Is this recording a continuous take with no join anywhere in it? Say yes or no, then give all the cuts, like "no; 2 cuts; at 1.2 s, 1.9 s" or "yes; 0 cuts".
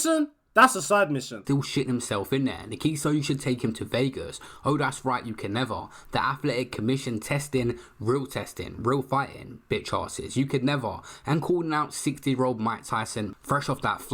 no; 1 cut; at 1.4 s